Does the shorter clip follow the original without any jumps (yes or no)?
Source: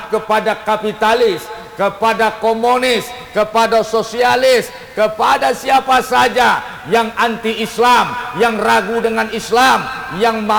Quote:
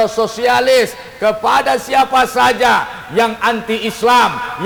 yes